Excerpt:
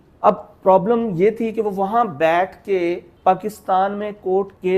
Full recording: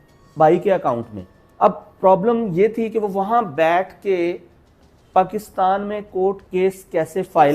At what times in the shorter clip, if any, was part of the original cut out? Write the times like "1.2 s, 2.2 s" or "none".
3.1 s